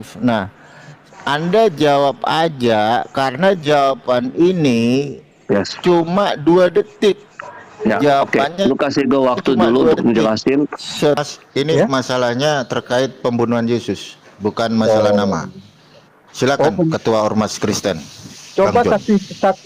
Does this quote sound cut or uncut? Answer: cut